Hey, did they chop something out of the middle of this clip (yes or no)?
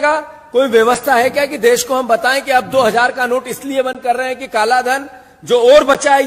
no